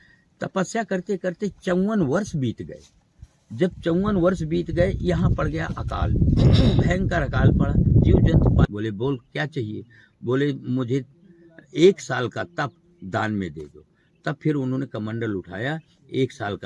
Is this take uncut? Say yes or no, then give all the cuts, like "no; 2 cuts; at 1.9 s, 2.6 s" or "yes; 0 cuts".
no; 1 cut; at 8.7 s